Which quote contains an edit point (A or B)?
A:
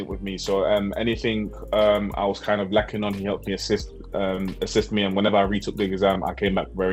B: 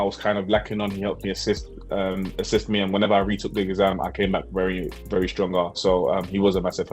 B